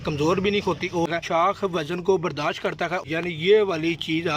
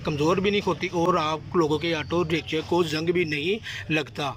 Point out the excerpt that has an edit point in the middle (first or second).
first